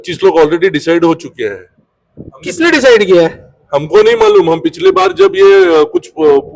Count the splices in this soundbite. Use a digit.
0